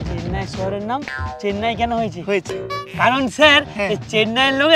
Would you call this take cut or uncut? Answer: uncut